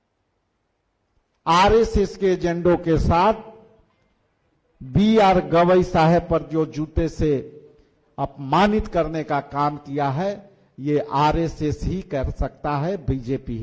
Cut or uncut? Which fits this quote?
uncut